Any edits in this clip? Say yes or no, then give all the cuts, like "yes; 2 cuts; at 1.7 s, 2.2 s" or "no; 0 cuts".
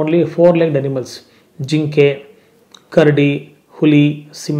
no; 0 cuts